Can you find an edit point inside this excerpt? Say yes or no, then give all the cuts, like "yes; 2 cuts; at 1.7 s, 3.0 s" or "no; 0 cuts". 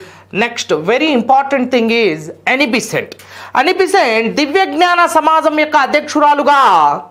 no; 0 cuts